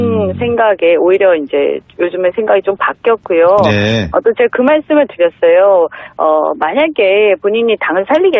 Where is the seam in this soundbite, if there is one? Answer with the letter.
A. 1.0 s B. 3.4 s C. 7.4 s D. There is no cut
A